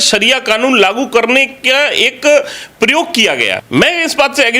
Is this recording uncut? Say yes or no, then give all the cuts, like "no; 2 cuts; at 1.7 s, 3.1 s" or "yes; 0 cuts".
no; 1 cut; at 3.6 s